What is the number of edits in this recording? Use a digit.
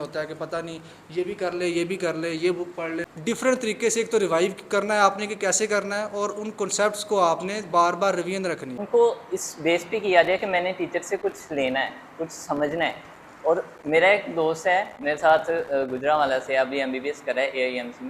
2